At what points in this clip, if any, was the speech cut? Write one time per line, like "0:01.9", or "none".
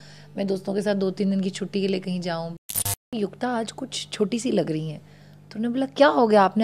0:03.1